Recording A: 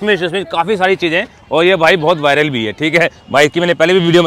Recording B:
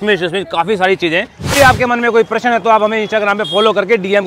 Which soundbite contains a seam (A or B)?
B